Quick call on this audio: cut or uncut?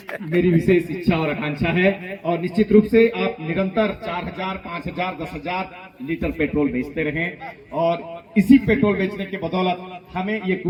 uncut